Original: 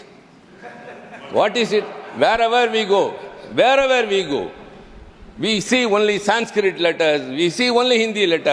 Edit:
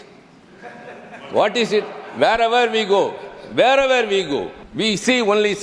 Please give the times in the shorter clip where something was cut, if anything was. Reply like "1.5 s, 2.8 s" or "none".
4.6 s